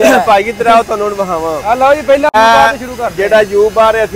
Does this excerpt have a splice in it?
yes; 1 cut; at 2.3 s

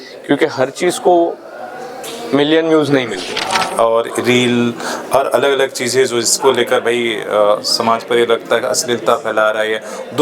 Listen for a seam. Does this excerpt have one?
yes; 1 cut; at 3.4 s

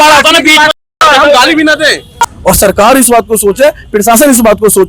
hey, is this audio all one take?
no; 1 cut; at 2.1 s

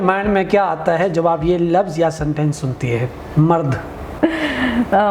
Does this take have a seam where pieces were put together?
yes; 1 cut; at 4.0 s

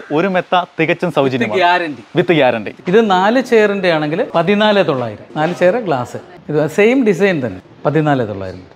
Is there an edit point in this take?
yes; 4 cuts; at 2.7 s, 4.3 s, 5.2 s, 7.6 s

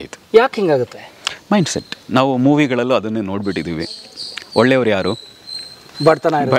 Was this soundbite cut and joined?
no; 0 cuts

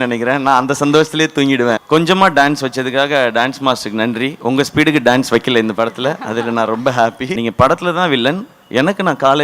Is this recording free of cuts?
no; 2 cuts; at 1.8 s, 7.3 s

